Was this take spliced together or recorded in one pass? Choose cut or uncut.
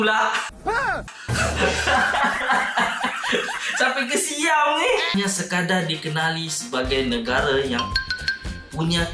cut